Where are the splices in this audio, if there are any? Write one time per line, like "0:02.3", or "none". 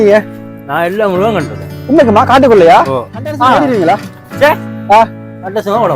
0:03.5